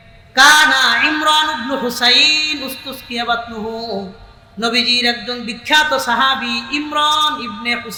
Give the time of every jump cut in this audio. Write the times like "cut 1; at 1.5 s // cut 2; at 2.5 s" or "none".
none